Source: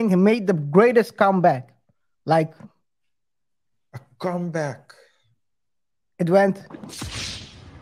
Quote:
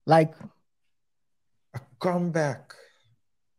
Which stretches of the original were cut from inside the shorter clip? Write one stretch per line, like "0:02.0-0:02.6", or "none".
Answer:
none